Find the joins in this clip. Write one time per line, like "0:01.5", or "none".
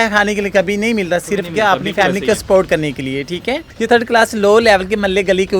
0:03.7